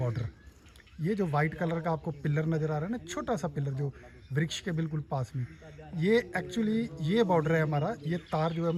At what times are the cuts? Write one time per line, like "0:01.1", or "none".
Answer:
none

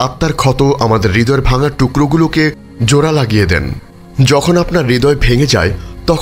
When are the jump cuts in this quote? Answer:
none

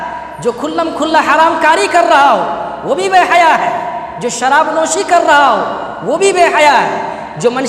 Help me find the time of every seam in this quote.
none

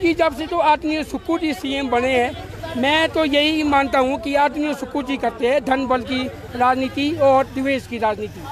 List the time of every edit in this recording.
none

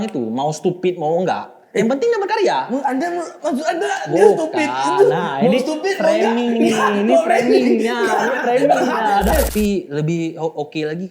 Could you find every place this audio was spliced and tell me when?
0:09.5

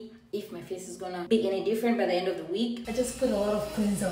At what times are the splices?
0:02.8

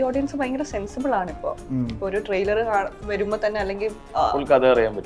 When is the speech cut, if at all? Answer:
none

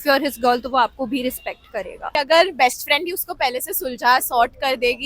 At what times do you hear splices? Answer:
0:01.9

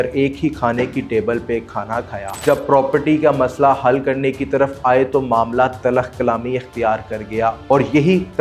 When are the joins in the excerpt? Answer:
0:02.2

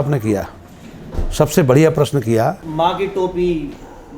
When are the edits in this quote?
0:02.6

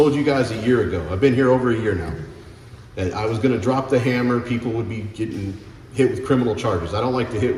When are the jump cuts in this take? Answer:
none

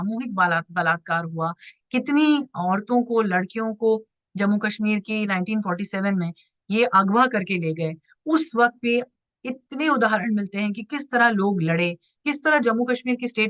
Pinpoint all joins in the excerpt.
none

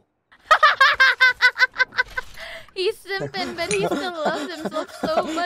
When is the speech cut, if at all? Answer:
none

